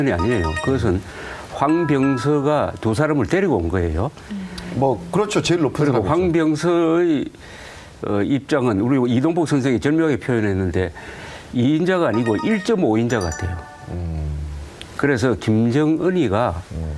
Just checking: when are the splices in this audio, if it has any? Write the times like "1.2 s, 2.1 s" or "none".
none